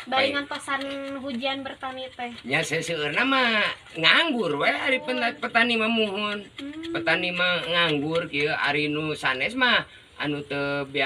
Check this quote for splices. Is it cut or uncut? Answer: uncut